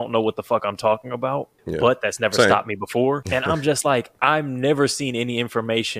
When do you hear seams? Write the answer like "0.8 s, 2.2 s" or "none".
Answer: 3.2 s